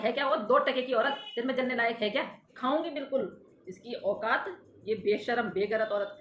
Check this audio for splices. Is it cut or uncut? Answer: cut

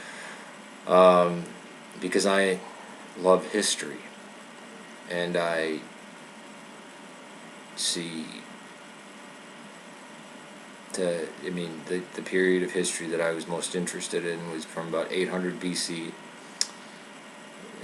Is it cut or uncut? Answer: uncut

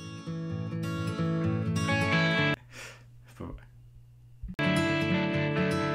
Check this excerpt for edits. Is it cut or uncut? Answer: uncut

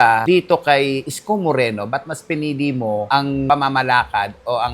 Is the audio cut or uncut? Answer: uncut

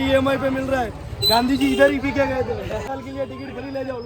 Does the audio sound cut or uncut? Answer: cut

